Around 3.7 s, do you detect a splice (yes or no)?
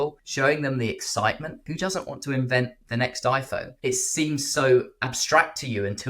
yes